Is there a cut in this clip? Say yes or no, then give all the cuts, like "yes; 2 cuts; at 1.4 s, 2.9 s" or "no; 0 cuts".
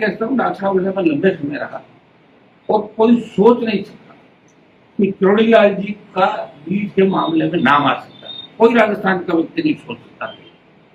no; 0 cuts